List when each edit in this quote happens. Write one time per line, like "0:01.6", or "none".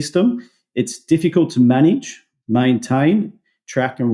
none